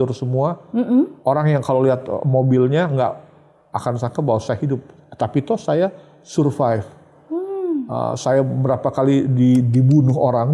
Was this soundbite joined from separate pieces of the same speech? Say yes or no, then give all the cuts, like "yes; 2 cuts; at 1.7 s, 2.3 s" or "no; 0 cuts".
yes; 1 cut; at 1.2 s